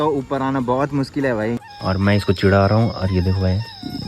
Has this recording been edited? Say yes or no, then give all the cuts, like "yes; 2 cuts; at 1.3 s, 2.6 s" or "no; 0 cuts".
yes; 1 cut; at 1.7 s